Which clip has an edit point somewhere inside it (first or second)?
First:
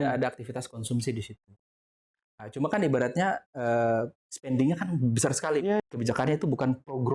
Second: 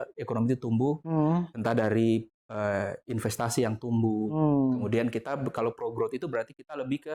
first